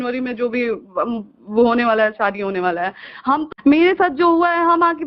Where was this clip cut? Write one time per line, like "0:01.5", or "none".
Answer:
0:03.5